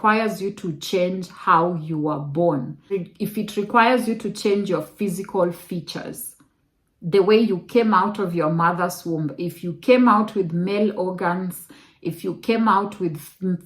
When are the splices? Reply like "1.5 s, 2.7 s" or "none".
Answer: 2.8 s